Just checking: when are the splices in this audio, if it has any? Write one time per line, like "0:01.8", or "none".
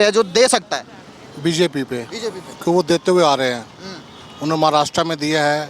none